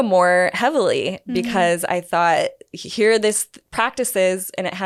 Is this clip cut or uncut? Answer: uncut